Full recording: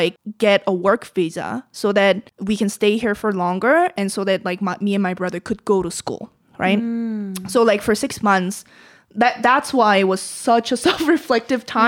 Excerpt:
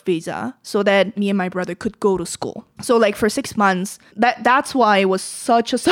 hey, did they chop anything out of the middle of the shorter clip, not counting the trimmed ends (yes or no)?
yes